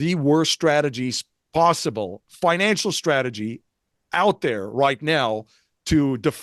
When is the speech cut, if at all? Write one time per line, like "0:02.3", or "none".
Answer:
0:02.2